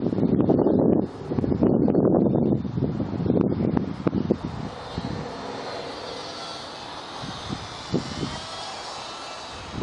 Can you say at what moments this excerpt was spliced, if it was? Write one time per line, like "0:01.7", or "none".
0:01.9